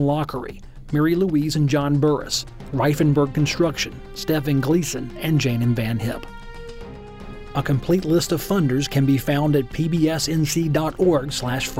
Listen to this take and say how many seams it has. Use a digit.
0